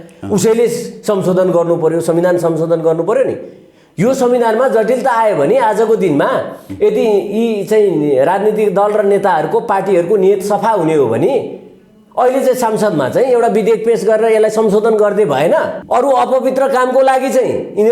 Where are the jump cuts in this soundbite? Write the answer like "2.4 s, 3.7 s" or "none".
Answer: 15.8 s